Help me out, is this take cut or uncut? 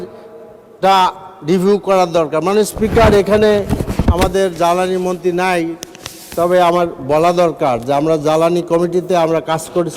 uncut